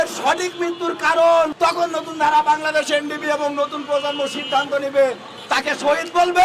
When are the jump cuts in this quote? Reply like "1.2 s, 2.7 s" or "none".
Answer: 1.5 s